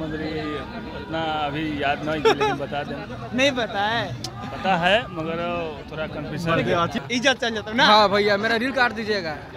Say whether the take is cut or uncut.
cut